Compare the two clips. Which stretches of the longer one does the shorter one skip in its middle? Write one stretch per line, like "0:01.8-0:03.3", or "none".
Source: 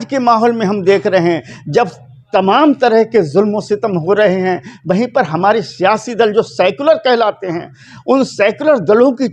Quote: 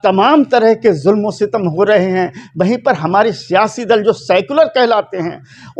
none